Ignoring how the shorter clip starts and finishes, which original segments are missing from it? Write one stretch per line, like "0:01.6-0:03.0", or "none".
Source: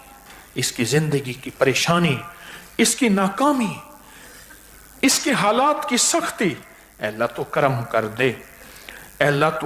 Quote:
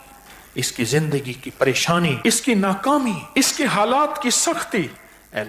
0:02.2-0:02.7
0:03.8-0:04.9